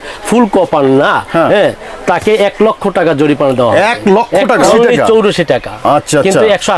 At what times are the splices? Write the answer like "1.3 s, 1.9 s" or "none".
4.7 s